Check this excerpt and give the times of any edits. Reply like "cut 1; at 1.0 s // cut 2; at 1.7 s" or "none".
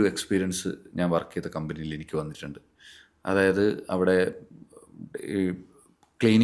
none